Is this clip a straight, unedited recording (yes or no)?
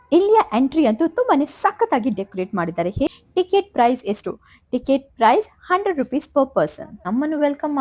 no